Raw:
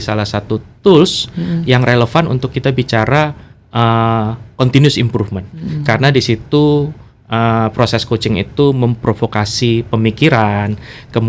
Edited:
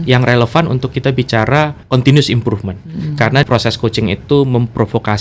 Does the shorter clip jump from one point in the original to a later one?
yes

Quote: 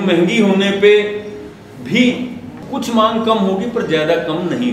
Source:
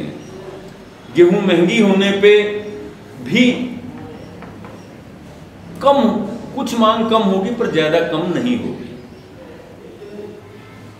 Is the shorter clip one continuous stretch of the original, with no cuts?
no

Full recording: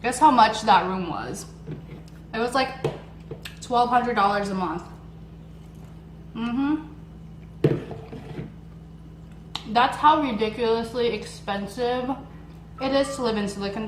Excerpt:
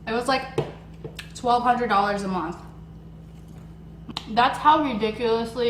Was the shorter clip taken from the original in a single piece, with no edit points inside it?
no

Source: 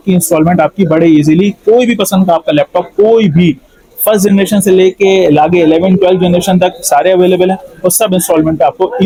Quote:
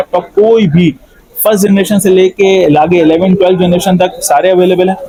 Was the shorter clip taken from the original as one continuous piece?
yes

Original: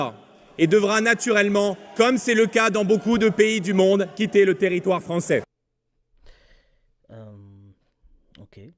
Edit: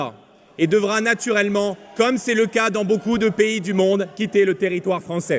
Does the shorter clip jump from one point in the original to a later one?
no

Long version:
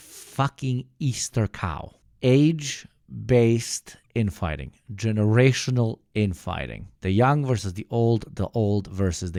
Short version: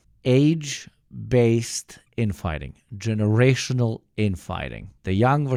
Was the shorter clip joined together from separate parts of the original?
no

